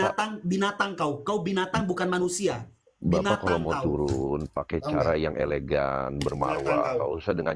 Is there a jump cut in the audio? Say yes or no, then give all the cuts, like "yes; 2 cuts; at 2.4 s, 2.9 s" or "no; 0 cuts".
no; 0 cuts